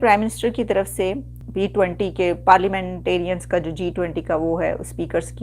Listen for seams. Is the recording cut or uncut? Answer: cut